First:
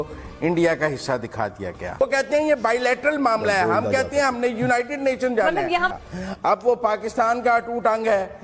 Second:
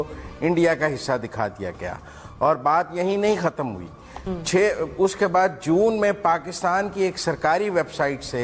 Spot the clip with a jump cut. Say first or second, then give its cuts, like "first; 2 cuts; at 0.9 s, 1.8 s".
first; 2 cuts; at 2.0 s, 6.0 s